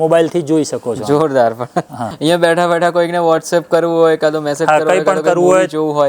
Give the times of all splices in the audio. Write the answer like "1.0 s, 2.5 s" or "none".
none